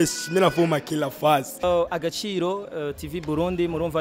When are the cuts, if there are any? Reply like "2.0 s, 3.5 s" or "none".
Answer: 1.6 s